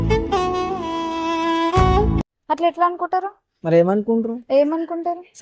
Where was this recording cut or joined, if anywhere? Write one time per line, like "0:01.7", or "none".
none